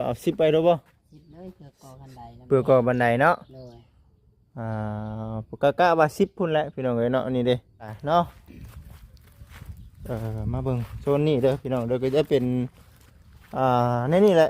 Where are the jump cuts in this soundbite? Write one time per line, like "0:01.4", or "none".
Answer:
0:08.0